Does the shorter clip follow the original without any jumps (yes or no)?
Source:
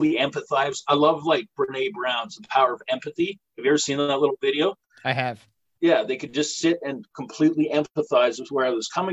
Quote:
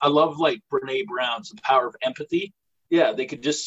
no